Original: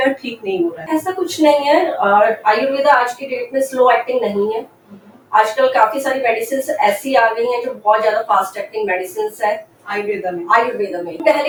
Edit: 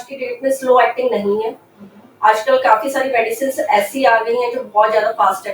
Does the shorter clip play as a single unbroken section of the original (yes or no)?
yes